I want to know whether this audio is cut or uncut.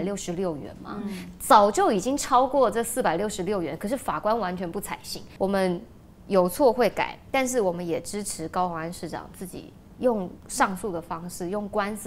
uncut